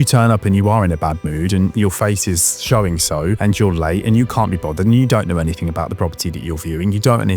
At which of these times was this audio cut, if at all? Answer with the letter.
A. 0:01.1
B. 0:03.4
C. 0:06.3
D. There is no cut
B